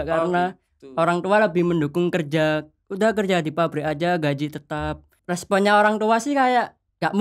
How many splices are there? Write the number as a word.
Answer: one